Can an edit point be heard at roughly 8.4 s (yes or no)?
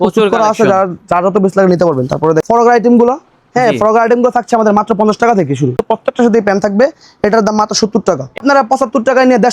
yes